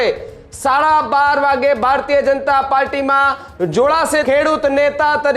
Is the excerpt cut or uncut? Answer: cut